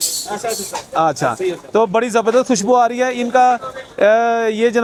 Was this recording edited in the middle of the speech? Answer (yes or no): no